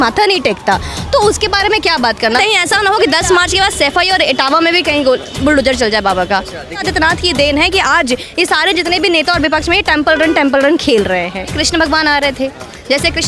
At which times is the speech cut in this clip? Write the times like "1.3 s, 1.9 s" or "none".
2.4 s, 6.8 s, 11.5 s